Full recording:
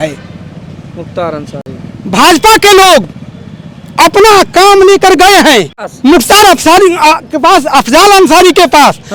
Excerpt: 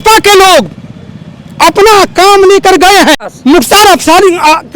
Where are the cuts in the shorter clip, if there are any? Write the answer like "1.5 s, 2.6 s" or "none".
3.3 s